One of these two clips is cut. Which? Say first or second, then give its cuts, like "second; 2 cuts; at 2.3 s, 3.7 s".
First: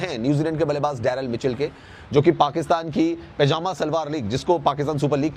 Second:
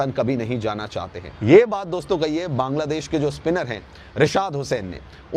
second; 1 cut; at 1.1 s